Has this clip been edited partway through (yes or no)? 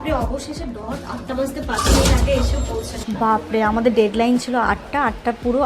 yes